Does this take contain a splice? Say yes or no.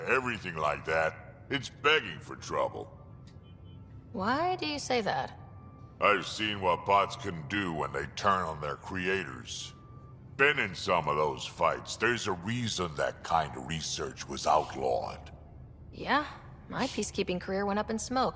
no